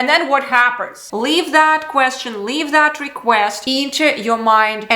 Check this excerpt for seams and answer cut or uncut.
cut